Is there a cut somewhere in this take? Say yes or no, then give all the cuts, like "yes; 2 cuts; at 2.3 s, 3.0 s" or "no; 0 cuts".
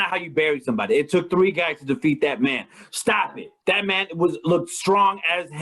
yes; 1 cut; at 3.5 s